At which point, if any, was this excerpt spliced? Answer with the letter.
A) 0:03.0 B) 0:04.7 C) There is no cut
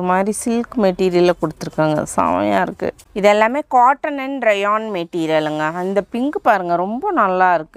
A